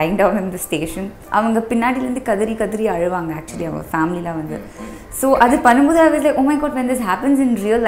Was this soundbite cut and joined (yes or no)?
yes